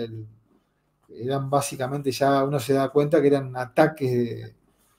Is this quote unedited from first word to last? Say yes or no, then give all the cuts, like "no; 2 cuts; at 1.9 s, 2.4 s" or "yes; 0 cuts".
yes; 0 cuts